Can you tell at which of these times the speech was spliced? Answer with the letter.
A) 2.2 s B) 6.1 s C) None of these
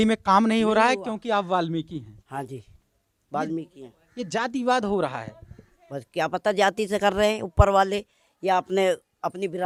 C